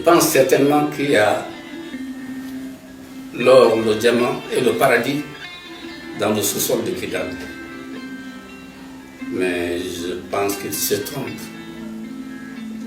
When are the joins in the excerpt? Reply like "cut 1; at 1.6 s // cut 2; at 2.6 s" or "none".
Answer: none